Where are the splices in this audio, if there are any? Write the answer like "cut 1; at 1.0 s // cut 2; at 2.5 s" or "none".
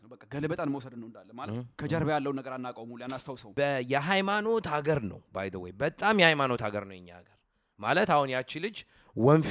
cut 1; at 3.4 s